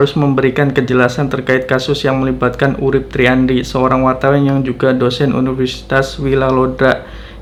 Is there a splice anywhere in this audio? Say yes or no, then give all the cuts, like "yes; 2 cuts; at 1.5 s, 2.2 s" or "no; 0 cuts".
no; 0 cuts